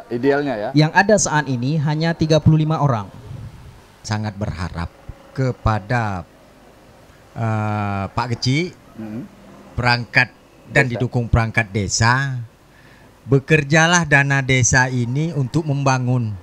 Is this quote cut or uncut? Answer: cut